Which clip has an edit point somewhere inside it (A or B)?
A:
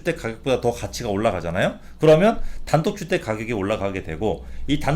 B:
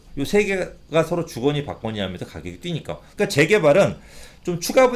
B